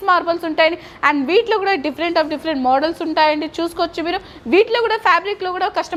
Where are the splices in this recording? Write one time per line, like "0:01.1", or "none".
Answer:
none